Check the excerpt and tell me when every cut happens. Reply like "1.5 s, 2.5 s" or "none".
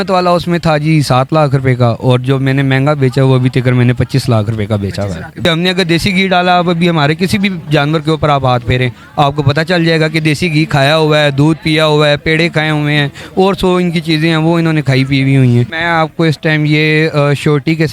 5.3 s, 15.7 s